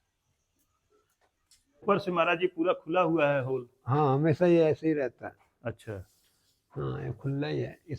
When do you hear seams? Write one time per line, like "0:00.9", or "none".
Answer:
0:01.8